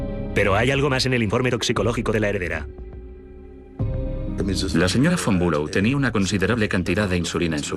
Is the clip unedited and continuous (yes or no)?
yes